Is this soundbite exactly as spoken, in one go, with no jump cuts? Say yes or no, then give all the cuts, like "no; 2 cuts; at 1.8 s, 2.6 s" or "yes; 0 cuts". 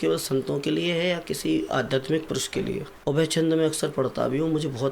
no; 1 cut; at 2.9 s